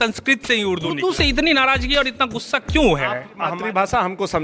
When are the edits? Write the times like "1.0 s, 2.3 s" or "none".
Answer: 1.0 s, 3.5 s